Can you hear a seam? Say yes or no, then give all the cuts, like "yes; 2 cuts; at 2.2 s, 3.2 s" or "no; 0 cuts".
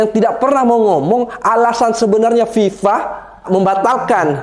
yes; 1 cut; at 3.4 s